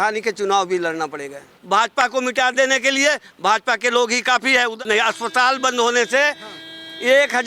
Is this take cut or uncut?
cut